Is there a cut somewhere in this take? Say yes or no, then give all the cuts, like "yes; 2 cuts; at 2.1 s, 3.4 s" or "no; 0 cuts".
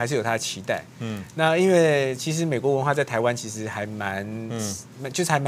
no; 0 cuts